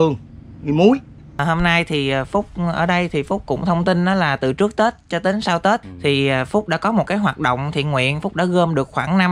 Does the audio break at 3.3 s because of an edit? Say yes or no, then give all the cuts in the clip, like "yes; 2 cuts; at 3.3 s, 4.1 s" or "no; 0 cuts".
no; 2 cuts; at 1.4 s, 5.9 s